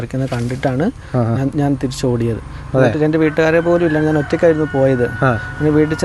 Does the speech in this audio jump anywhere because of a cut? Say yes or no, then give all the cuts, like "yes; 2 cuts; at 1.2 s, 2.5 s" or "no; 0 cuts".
no; 0 cuts